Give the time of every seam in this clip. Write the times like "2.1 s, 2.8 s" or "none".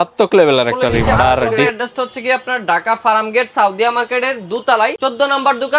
1.7 s